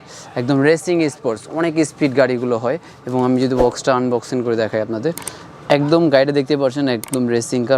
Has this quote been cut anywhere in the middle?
no; 0 cuts

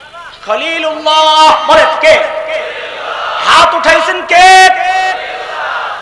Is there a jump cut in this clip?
no; 0 cuts

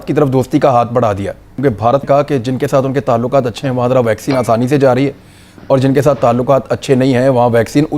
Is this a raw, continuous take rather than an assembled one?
no; 1 cut; at 1.6 s

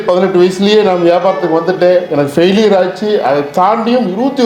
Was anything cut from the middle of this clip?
no; 0 cuts

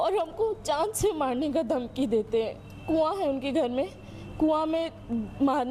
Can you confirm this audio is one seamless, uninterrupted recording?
yes; 0 cuts

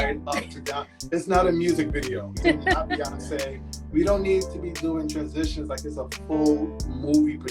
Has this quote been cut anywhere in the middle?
yes; 1 cut; at 2.4 s

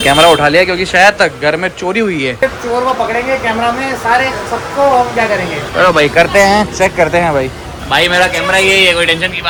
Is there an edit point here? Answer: no; 0 cuts

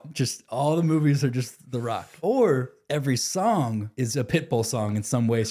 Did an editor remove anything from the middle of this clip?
yes; 3 cuts; at 2.1 s, 2.8 s, 3.9 s

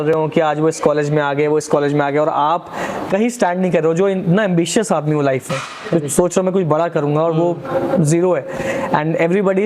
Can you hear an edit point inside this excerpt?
no; 0 cuts

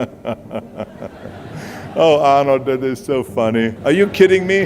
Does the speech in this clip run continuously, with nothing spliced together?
no; 1 cut; at 3.8 s

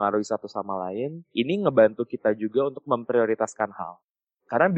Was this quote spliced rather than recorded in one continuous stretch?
yes; 1 cut; at 1.2 s

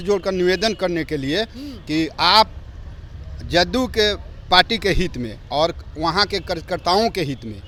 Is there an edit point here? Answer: no; 0 cuts

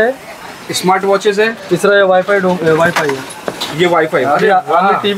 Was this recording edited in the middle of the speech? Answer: no; 0 cuts

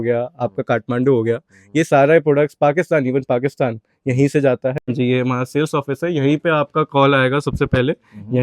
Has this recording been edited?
yes; 1 cut; at 5.1 s

